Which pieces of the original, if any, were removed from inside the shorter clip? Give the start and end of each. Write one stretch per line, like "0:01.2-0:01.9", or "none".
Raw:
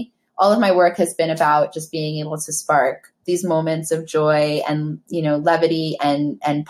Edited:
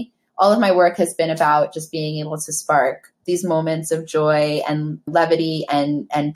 0:05.1-0:05.4